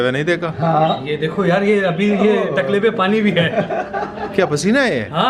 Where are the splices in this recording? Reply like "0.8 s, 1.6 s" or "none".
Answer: none